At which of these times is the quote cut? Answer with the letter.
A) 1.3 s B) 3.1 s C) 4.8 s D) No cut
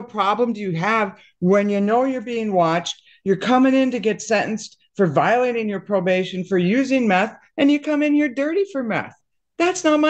D